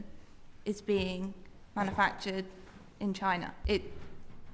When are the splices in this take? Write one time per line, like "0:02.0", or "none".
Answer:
0:03.6